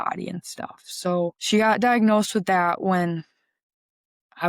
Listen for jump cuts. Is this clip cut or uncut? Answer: cut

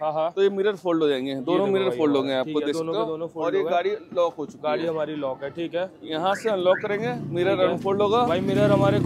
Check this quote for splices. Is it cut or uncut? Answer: uncut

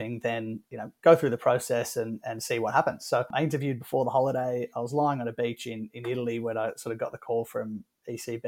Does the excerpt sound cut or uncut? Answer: cut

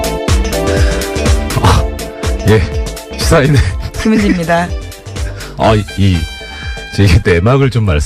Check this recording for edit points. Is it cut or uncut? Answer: uncut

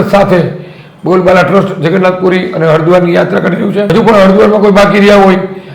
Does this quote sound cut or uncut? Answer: cut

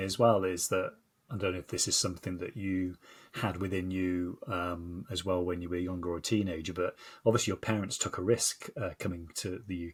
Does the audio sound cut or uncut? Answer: uncut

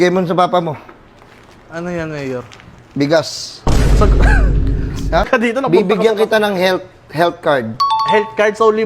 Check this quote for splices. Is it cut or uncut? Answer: cut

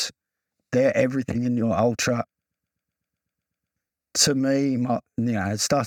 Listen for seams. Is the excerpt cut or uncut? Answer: uncut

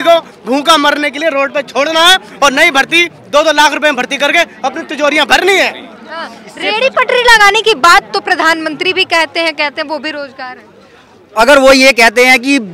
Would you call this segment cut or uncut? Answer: uncut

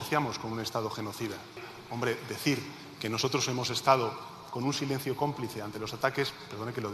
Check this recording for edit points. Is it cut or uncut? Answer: cut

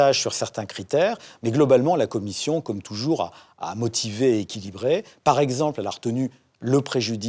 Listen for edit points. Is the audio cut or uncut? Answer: uncut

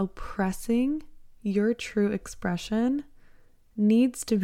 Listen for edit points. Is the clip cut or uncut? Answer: uncut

